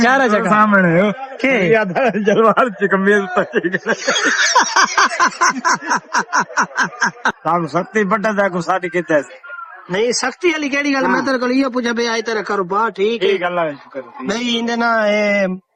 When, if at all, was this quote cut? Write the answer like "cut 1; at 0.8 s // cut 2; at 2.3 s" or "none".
cut 1; at 7.4 s